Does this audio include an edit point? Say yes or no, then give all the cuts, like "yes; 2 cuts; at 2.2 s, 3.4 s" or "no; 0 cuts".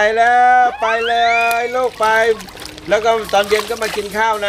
no; 0 cuts